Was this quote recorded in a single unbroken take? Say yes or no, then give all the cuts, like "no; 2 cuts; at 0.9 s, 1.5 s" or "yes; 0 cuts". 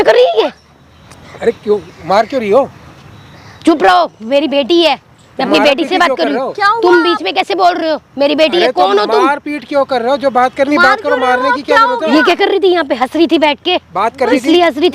yes; 0 cuts